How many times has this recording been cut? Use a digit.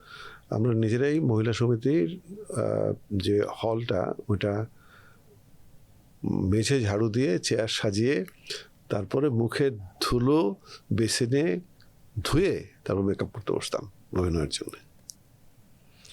0